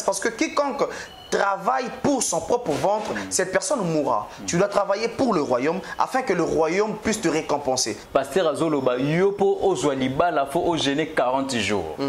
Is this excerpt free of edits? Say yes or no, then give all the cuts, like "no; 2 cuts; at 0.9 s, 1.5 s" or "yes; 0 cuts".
no; 1 cut; at 8.0 s